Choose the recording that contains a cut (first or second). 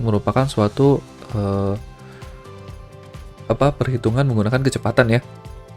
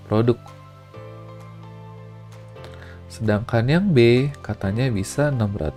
first